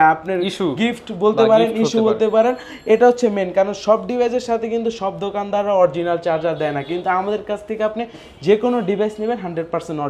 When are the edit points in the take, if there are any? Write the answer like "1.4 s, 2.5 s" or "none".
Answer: none